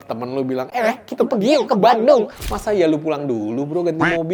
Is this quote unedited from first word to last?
yes; 0 cuts

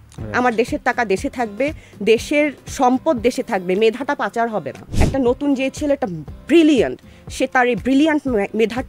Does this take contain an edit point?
yes; 1 cut; at 4.9 s

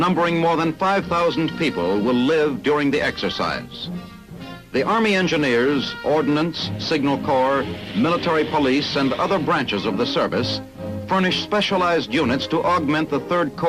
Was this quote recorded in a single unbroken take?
yes; 0 cuts

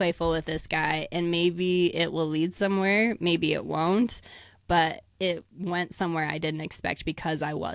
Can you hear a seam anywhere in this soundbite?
no; 0 cuts

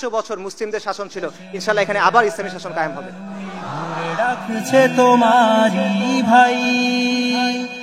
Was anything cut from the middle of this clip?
yes; 1 cut; at 4.0 s

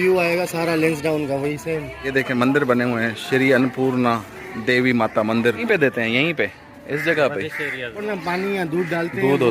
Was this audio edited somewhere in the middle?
yes; 3 cuts; at 2.1 s, 5.6 s, 8.0 s

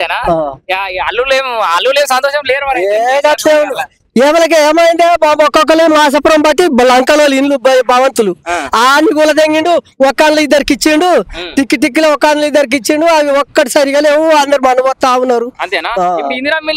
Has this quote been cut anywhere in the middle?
no; 0 cuts

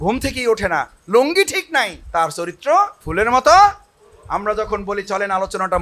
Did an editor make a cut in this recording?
yes; 2 cuts; at 2.0 s, 3.0 s

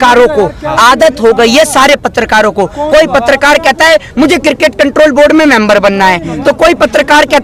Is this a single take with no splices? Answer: yes; 0 cuts

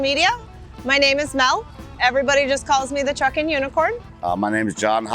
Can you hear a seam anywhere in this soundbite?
yes; 1 cut; at 4.1 s

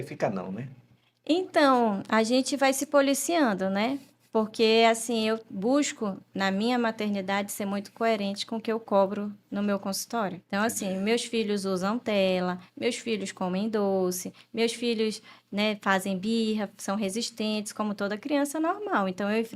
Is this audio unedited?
no; 1 cut; at 10.4 s

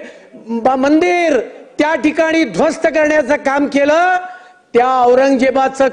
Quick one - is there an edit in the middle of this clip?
no; 0 cuts

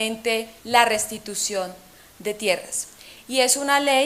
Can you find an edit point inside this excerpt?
no; 0 cuts

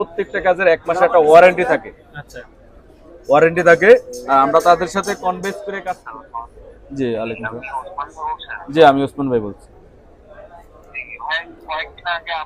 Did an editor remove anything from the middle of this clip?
yes; 1 cut; at 6.1 s

